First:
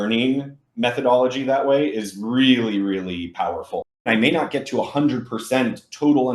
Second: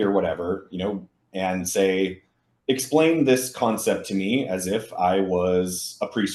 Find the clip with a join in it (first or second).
first